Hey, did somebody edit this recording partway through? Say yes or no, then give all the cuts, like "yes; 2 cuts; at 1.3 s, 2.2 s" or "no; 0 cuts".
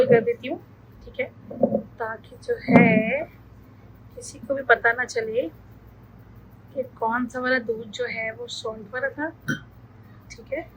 yes; 1 cut; at 1.0 s